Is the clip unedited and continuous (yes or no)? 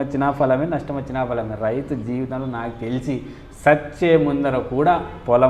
yes